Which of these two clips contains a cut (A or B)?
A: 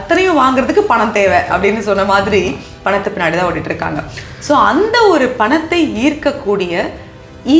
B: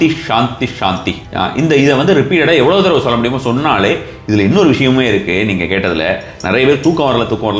B